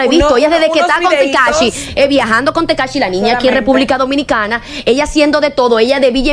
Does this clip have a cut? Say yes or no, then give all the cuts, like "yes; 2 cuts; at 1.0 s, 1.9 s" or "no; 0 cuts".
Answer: no; 0 cuts